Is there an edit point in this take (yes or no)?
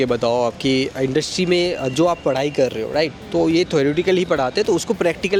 no